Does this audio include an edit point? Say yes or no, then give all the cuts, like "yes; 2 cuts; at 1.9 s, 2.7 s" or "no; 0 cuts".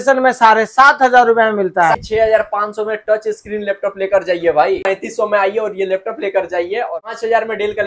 yes; 3 cuts; at 2.0 s, 4.9 s, 7.0 s